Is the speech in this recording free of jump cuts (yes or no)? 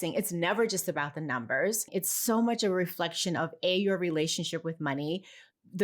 no